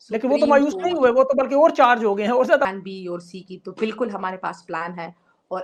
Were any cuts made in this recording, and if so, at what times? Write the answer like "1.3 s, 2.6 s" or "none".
2.6 s